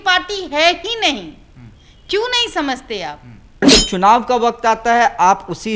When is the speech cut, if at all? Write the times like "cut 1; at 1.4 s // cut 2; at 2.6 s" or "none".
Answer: cut 1; at 3.6 s